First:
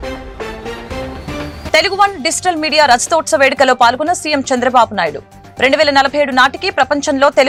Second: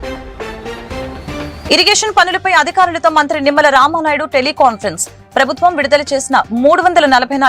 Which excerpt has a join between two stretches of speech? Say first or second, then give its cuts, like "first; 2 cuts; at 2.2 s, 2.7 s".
second; 1 cut; at 1.6 s